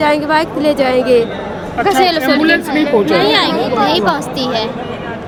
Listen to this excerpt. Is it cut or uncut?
uncut